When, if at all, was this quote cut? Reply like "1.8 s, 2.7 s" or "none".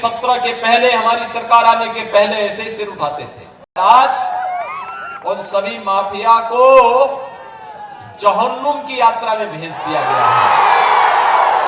3.8 s